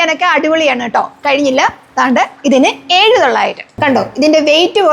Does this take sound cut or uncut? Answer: cut